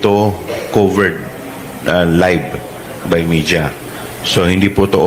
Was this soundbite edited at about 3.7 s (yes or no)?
no